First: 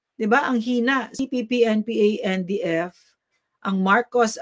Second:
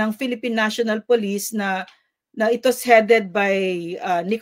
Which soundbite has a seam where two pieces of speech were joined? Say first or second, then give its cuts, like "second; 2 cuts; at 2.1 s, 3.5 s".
first; 1 cut; at 1.2 s